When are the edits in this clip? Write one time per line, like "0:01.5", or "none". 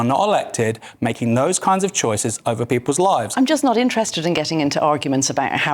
0:03.3